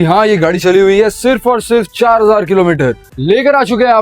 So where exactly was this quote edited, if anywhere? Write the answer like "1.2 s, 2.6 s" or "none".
3.1 s